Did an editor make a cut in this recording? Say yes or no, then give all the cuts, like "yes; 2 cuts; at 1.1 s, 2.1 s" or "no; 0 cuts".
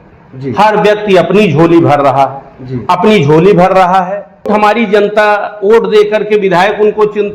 yes; 1 cut; at 4.5 s